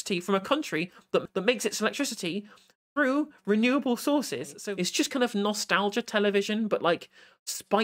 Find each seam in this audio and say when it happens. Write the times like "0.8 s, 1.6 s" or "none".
1.2 s, 4.6 s